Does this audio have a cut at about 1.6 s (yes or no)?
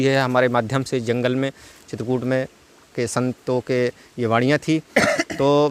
no